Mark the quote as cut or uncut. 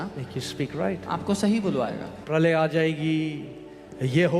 cut